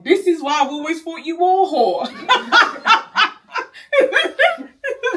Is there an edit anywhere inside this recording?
no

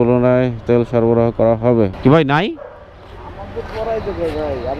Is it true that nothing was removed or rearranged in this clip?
no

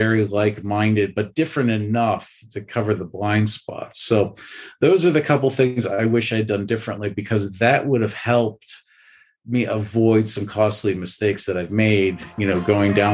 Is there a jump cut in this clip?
no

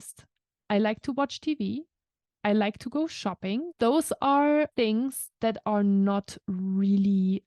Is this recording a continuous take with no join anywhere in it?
no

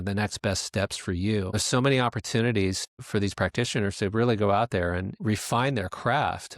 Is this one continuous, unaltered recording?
no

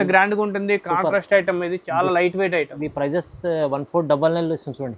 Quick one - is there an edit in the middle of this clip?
no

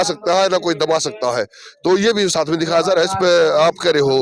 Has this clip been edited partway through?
no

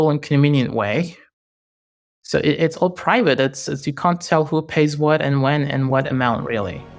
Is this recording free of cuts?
no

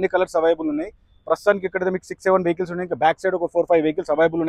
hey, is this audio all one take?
yes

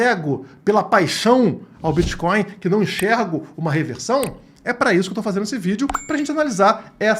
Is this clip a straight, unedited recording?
yes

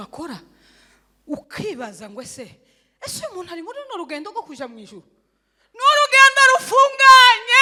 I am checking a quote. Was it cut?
no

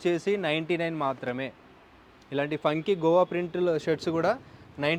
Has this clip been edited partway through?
no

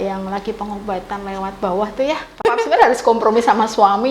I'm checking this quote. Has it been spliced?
yes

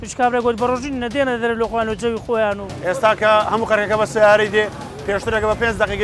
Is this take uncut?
no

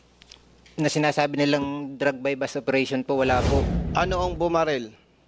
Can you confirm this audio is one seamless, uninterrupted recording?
no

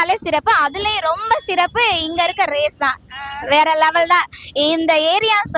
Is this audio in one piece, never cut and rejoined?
yes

